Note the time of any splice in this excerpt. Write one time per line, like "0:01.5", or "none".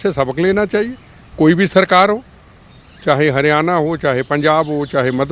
none

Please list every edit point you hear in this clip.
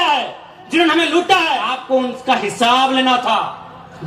0:01.7

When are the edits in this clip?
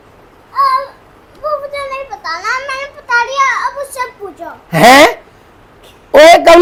none

